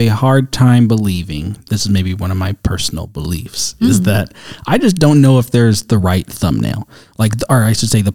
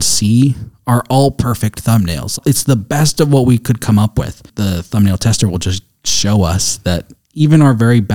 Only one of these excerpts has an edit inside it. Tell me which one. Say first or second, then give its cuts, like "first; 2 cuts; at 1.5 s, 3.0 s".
second; 2 cuts; at 2.3 s, 4.5 s